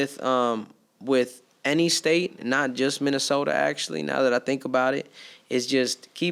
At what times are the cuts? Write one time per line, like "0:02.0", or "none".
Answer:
none